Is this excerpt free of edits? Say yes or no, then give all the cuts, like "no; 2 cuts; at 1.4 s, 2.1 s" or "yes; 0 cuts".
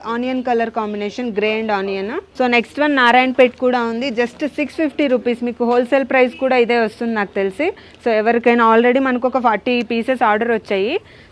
yes; 0 cuts